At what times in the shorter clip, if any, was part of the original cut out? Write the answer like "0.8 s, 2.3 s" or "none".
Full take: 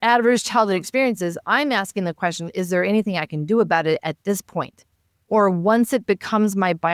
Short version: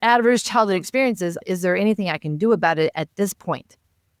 1.4 s